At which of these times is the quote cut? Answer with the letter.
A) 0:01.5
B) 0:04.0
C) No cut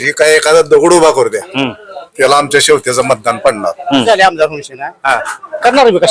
B